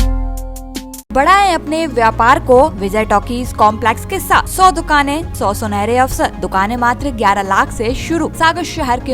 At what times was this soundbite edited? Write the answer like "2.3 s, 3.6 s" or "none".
1.1 s, 2.8 s, 4.5 s, 5.3 s, 6.4 s, 8.3 s